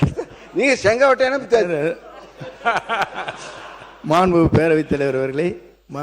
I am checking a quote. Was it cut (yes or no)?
no